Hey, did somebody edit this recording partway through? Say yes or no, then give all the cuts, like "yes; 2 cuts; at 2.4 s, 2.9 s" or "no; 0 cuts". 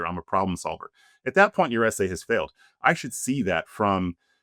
no; 0 cuts